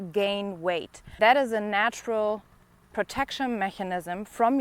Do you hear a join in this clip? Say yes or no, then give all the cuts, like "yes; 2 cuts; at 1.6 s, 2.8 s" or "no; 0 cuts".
yes; 1 cut; at 1.1 s